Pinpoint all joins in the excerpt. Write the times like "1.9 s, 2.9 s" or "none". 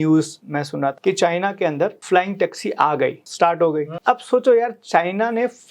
1.0 s, 2.0 s, 3.2 s, 3.9 s